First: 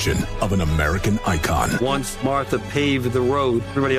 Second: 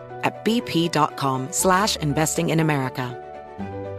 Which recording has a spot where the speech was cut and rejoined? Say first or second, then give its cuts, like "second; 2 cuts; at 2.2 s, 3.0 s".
second; 2 cuts; at 1.5 s, 3.1 s